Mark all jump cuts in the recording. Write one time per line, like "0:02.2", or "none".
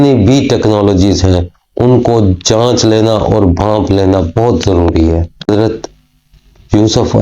0:05.5